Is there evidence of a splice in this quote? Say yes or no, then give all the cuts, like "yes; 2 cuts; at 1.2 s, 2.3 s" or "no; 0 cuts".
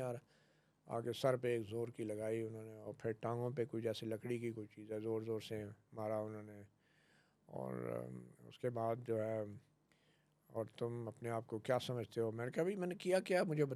no; 0 cuts